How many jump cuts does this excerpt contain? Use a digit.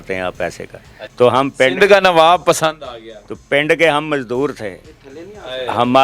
1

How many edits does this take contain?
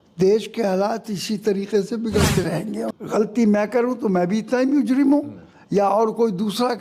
1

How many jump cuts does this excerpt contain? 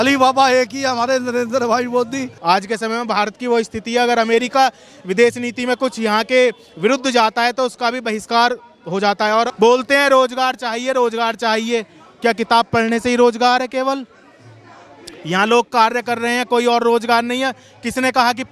2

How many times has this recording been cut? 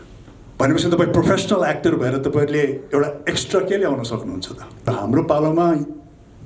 1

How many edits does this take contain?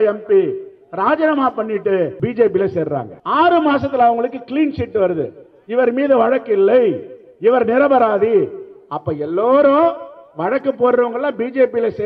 2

